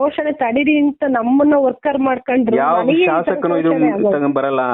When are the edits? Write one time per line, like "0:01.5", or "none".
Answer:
none